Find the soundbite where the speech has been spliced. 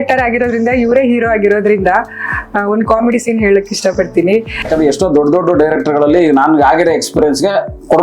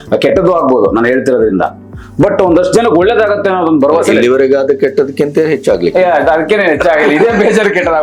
first; 1 cut; at 4.7 s

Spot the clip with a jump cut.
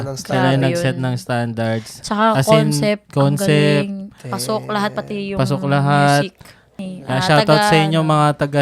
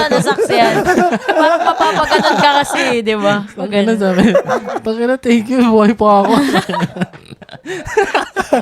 first; 1 cut; at 6.8 s

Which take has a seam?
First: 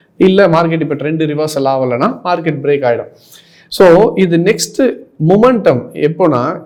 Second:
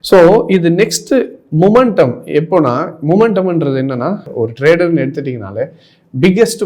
second; 1 cut; at 4.3 s

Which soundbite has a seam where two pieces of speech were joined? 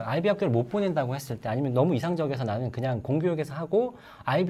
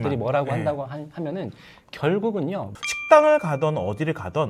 second; 1 cut; at 2.7 s

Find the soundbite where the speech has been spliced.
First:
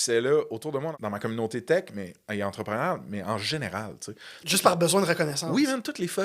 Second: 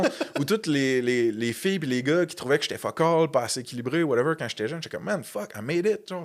first; 1 cut; at 0.9 s

